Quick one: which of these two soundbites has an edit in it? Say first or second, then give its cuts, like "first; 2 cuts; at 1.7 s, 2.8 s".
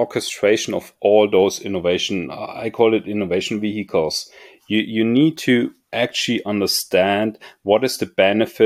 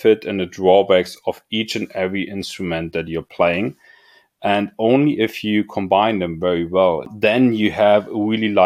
second; 1 cut; at 7.1 s